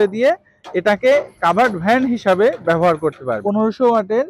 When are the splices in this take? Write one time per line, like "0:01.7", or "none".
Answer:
0:03.4